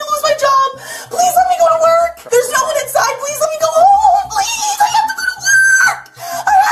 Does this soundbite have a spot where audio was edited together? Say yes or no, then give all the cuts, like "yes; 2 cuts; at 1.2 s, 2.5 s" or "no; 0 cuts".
no; 0 cuts